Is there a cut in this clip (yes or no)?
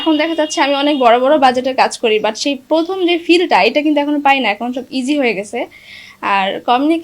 no